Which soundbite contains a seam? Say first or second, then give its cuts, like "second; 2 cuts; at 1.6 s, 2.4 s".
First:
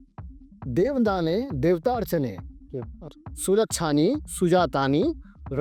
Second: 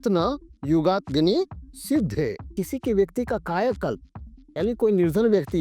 second; 1 cut; at 2.6 s